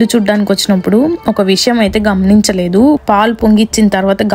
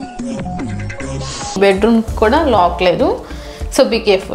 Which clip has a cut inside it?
second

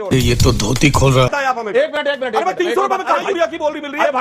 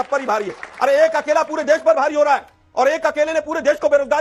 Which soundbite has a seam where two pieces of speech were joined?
first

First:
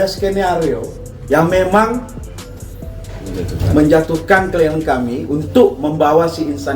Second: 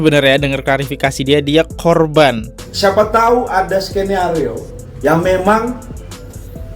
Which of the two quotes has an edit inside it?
second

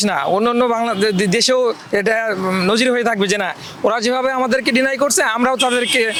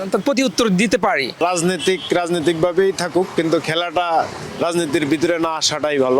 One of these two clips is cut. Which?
second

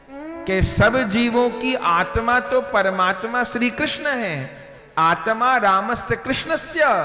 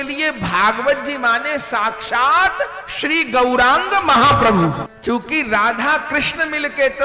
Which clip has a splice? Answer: second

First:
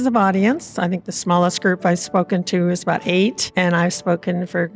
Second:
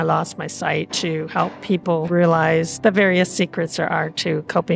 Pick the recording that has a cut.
second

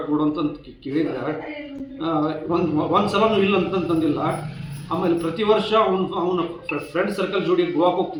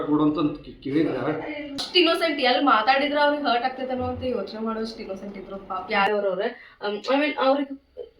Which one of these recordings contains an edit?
second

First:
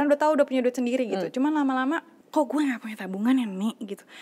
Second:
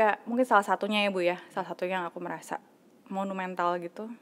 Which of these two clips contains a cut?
first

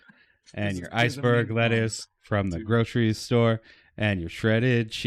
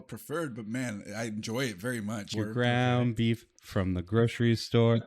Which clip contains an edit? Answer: second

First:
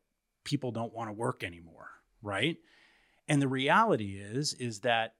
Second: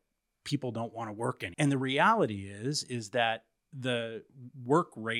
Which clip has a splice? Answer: second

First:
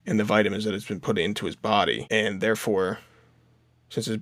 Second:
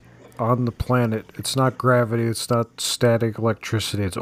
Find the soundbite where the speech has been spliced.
first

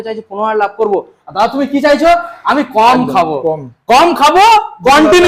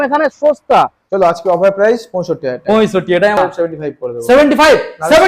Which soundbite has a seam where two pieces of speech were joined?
second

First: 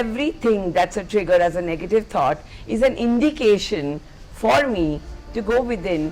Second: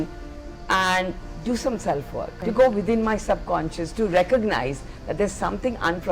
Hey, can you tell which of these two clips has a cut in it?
second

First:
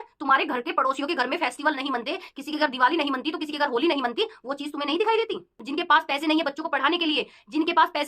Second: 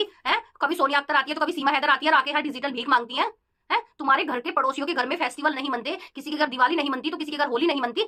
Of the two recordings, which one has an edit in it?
first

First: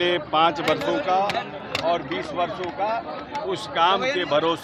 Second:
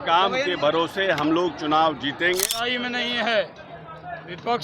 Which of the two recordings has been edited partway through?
second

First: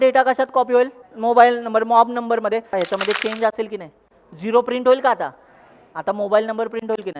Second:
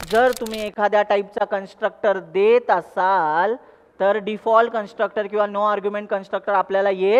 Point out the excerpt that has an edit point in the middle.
first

